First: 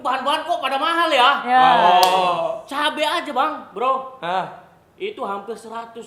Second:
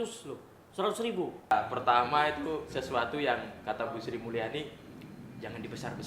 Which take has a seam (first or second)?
second